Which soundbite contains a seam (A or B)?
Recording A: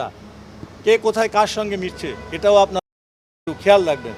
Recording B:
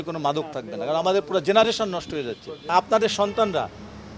B